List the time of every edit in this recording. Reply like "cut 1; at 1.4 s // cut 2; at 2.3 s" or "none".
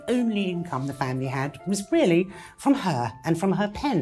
none